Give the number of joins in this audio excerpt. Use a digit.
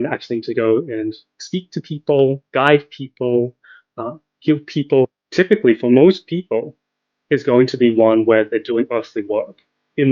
1